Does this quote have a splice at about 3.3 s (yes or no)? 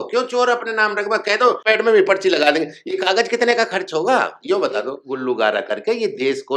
no